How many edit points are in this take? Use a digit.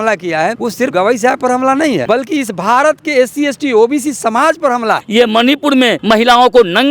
4